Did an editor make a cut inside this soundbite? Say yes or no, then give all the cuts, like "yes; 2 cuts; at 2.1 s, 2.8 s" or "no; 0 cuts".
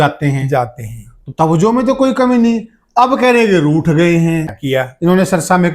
yes; 1 cut; at 4.5 s